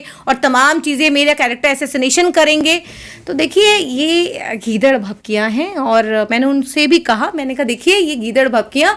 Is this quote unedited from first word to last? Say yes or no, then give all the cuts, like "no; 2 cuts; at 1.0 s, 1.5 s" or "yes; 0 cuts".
yes; 0 cuts